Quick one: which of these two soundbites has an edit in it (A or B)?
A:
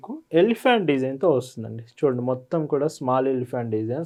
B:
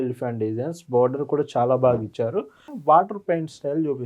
B